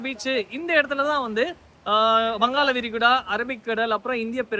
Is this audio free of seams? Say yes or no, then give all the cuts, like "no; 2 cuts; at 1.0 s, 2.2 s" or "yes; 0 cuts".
yes; 0 cuts